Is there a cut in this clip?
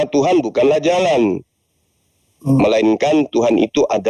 no; 0 cuts

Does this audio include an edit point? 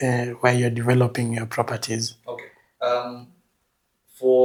no; 0 cuts

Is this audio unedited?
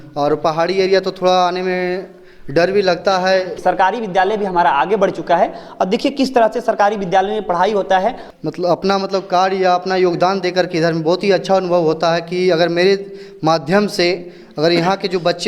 no; 2 cuts; at 3.6 s, 8.3 s

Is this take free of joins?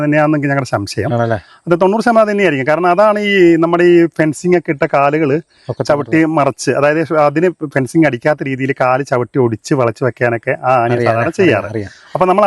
yes; 0 cuts

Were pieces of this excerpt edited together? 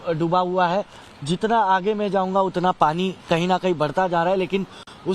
no; 0 cuts

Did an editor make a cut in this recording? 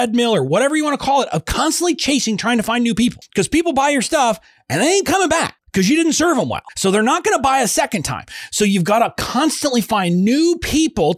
yes; 3 cuts; at 3.2 s, 5.6 s, 6.6 s

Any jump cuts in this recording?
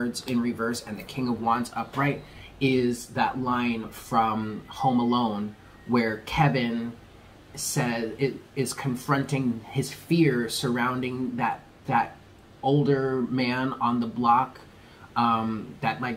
no; 0 cuts

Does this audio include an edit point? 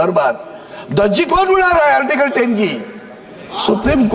no; 0 cuts

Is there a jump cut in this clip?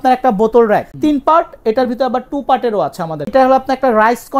yes; 2 cuts; at 0.9 s, 3.3 s

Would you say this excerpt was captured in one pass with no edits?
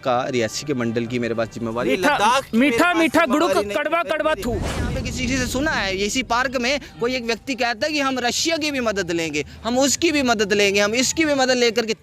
no; 1 cut; at 4.8 s

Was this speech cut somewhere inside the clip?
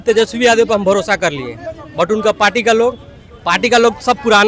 no; 0 cuts

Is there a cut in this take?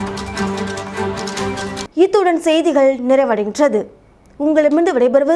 no; 0 cuts

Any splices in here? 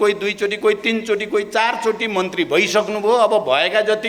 no; 0 cuts

